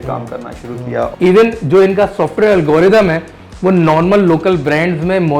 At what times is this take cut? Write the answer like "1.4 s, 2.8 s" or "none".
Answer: 1.1 s